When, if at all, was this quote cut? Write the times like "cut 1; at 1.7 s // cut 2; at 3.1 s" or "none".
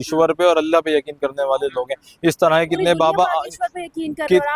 none